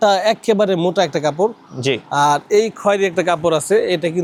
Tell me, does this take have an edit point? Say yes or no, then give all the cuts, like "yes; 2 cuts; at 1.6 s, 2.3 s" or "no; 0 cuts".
no; 0 cuts